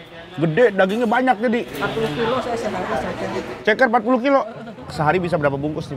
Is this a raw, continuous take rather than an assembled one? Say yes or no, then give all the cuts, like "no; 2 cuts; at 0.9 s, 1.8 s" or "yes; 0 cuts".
no; 1 cut; at 4.9 s